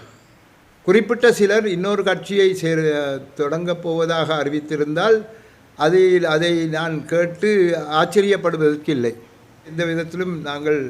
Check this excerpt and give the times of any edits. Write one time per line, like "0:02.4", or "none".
0:09.7